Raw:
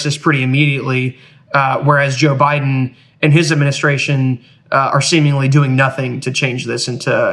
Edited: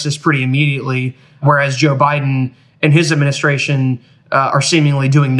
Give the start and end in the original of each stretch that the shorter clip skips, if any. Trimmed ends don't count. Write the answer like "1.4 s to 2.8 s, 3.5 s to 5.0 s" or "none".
1.4 s to 1.8 s